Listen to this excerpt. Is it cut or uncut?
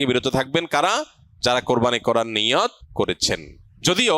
cut